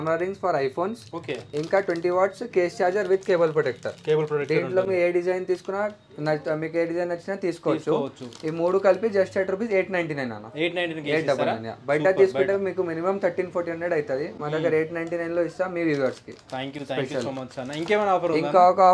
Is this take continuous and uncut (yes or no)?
yes